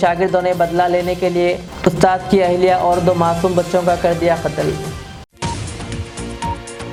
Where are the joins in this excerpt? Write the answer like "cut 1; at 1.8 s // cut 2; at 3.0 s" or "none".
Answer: none